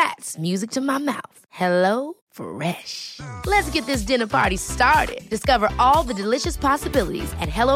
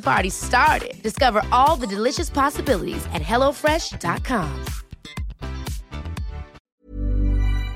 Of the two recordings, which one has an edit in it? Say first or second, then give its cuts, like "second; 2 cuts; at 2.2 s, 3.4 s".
second; 1 cut; at 6.6 s